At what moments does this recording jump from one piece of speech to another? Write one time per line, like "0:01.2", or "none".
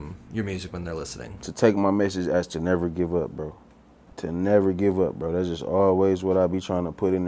none